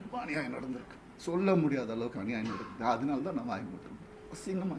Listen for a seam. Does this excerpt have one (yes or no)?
no